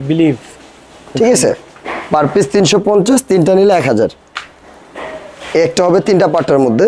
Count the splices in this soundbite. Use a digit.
0